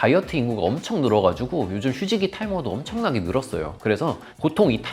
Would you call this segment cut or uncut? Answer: cut